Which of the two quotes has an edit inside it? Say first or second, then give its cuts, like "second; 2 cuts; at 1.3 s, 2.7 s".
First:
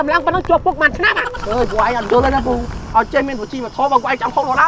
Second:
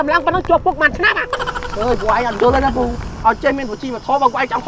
first; 1 cut; at 1.3 s